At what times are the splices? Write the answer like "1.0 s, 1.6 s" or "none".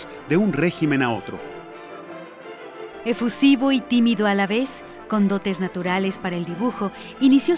4.0 s